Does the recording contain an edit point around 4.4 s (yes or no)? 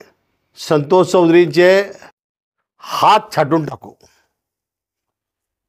no